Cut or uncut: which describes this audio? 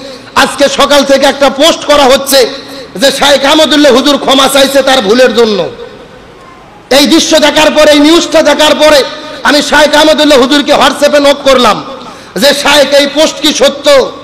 uncut